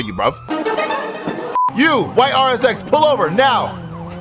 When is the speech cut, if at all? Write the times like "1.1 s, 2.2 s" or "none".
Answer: 1.6 s